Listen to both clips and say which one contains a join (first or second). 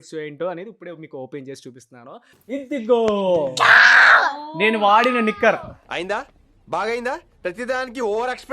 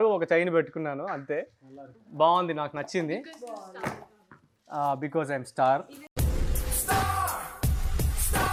first